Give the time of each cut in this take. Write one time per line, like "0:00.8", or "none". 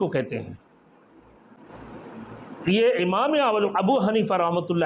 0:01.5